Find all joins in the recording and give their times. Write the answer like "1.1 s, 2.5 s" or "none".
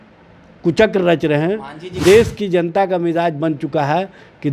2.0 s